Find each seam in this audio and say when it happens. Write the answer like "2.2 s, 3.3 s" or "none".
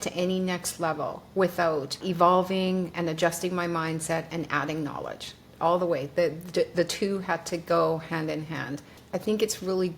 2.0 s, 9.0 s